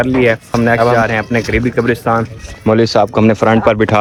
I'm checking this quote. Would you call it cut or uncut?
uncut